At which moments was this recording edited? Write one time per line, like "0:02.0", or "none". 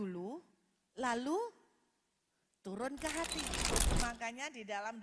0:03.8